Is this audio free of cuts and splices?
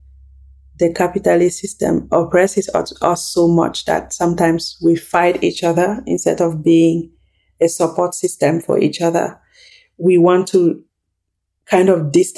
yes; 0 cuts

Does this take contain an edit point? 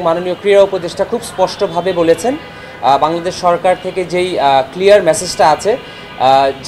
no; 0 cuts

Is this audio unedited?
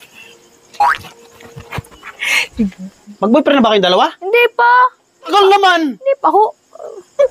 no; 2 cuts; at 3.0 s, 5.3 s

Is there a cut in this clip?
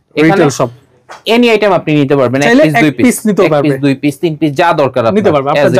no; 0 cuts

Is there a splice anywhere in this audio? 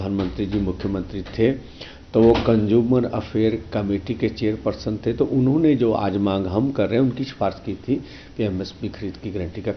no; 0 cuts

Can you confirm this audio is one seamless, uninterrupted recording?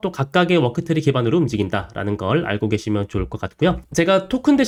yes; 0 cuts

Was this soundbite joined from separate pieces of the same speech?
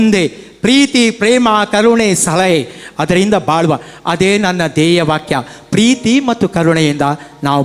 no; 0 cuts

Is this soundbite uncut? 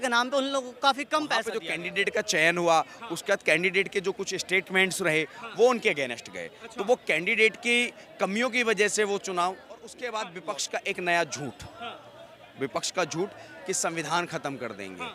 no; 2 cuts; at 1.6 s, 10.0 s

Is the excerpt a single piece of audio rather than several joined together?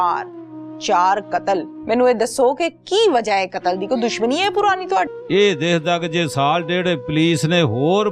no; 1 cut; at 1.7 s

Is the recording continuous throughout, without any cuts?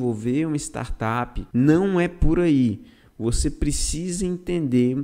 no; 1 cut; at 1.4 s

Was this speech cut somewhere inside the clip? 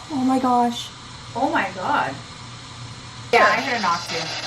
yes; 1 cut; at 3.3 s

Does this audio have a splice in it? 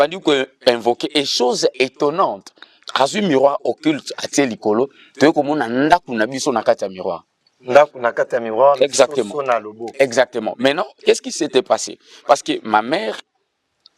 no; 0 cuts

